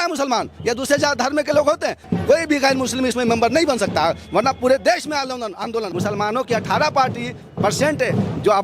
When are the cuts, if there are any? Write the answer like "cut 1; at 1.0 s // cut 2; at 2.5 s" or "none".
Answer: cut 1; at 2.0 s // cut 2; at 5.8 s